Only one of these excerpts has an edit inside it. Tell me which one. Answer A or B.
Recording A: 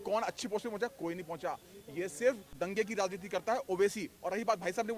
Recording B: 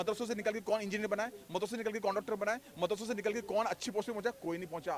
A